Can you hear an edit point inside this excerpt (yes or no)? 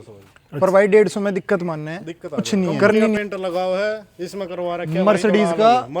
yes